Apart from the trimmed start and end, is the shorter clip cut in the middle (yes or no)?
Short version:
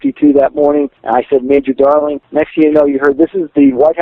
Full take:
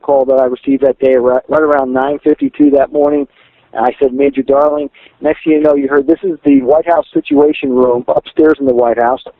yes